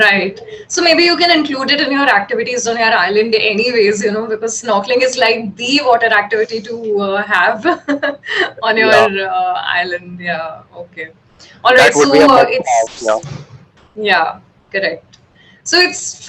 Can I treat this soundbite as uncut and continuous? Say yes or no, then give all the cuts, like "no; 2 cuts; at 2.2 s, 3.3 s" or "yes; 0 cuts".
yes; 0 cuts